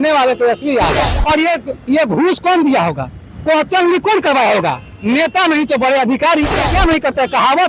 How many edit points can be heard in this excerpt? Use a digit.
2